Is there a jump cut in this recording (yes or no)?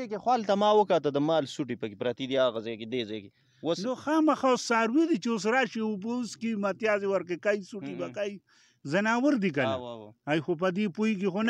no